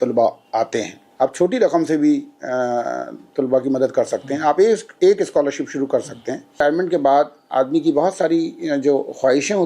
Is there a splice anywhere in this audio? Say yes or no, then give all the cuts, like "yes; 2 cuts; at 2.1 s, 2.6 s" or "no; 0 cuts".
yes; 2 cuts; at 1.0 s, 6.6 s